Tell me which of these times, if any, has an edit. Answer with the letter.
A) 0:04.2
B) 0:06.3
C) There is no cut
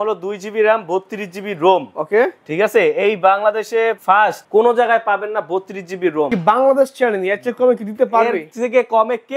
B